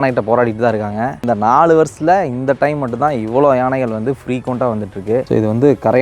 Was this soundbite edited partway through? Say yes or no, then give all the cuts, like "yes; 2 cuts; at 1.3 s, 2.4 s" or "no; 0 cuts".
yes; 2 cuts; at 1.1 s, 5.2 s